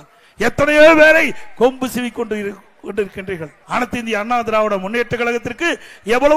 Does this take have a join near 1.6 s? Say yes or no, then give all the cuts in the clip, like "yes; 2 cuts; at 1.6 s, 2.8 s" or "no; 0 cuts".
no; 1 cut; at 3.5 s